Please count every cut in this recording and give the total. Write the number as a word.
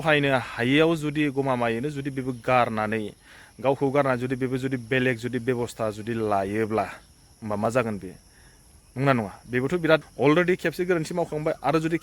one